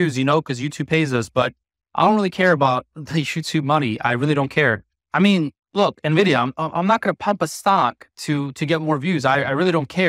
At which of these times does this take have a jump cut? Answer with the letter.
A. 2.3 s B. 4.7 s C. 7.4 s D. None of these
D